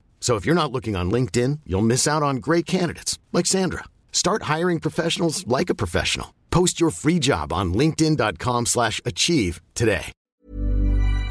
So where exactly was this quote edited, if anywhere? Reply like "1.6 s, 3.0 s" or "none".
10.1 s